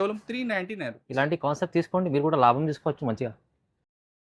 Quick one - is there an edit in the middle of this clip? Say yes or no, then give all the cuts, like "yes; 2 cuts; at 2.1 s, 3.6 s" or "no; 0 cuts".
no; 0 cuts